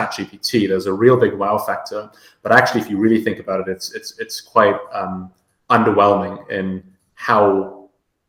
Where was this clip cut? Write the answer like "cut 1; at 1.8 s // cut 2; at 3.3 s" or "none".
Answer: none